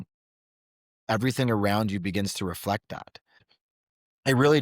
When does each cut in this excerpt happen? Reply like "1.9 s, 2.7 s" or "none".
3.6 s